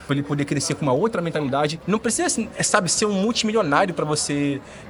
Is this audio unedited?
no; 1 cut; at 1.8 s

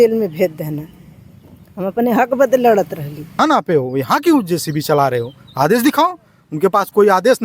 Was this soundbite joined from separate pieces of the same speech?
yes; 1 cut; at 3.3 s

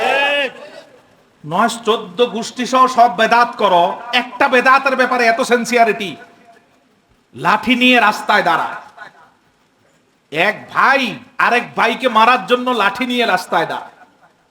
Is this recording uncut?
yes; 0 cuts

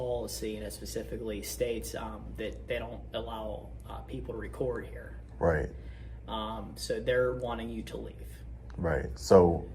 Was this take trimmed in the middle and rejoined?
no; 0 cuts

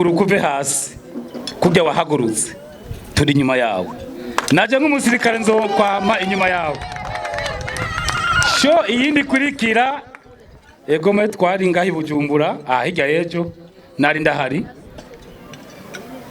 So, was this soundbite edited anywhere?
no; 0 cuts

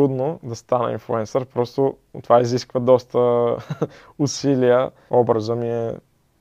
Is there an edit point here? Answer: yes; 1 cut; at 5.0 s

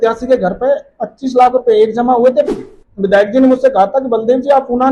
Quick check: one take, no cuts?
no; 1 cut; at 2.6 s

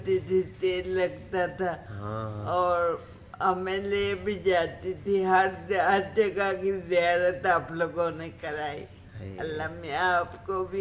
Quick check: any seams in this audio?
no; 0 cuts

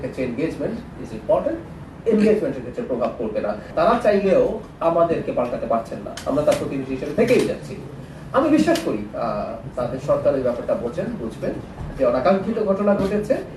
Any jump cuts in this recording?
yes; 1 cut; at 3.6 s

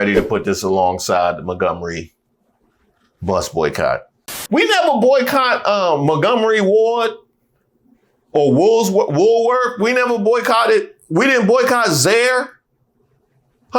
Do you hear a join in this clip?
yes; 1 cut; at 4.4 s

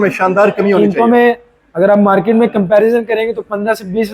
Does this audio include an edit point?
no; 0 cuts

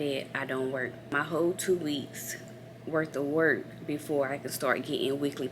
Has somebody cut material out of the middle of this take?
yes; 1 cut; at 1.1 s

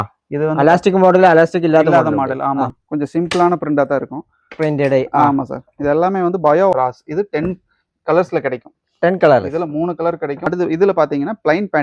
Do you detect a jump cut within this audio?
yes; 3 cuts; at 2.8 s, 6.7 s, 10.4 s

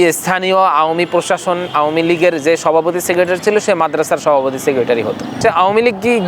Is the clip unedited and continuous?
no; 1 cut; at 5.4 s

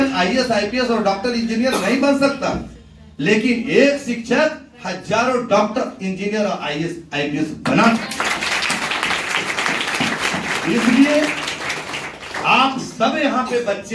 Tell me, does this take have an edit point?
no; 0 cuts

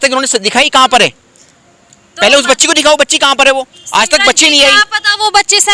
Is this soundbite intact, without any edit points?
yes; 0 cuts

